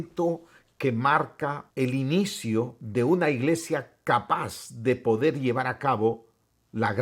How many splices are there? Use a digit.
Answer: 2